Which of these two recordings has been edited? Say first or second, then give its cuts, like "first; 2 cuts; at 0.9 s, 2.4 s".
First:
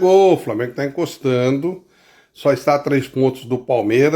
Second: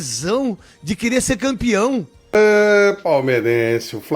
second; 1 cut; at 2.3 s